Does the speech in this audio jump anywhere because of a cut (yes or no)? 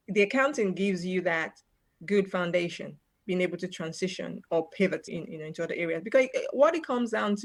no